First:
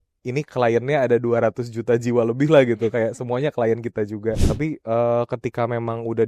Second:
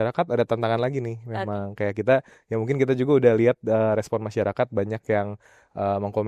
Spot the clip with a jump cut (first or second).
first